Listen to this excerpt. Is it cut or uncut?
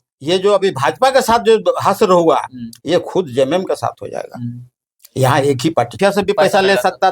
cut